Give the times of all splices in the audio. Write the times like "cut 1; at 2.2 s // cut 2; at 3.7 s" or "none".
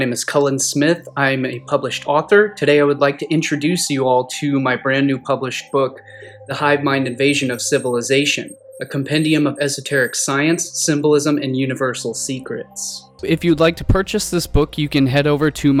none